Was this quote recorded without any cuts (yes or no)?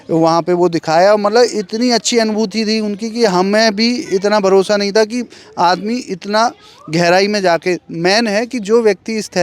yes